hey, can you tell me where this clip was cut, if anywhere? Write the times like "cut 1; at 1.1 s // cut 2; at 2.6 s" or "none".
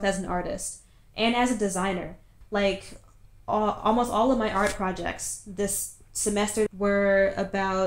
cut 1; at 2.3 s // cut 2; at 6.7 s